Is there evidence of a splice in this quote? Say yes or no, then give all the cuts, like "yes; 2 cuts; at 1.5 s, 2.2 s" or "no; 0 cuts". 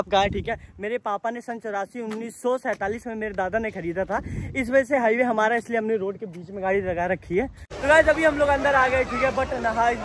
yes; 1 cut; at 7.7 s